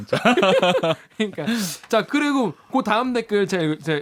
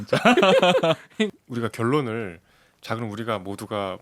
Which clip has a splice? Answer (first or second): second